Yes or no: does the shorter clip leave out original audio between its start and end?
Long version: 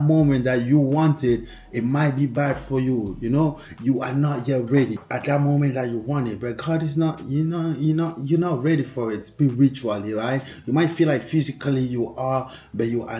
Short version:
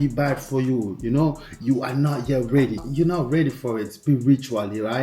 yes